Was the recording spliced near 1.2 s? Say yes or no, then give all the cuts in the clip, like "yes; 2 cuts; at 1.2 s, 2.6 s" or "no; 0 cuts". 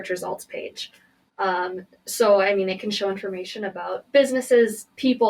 no; 0 cuts